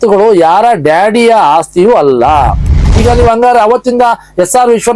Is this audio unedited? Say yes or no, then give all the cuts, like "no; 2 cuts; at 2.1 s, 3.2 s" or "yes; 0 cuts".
no; 1 cut; at 2.8 s